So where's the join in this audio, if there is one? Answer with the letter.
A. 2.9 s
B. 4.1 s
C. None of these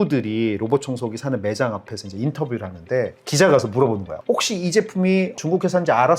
B